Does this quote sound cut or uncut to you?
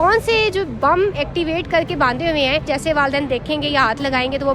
cut